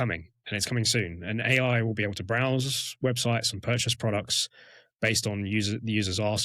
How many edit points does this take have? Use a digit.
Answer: 0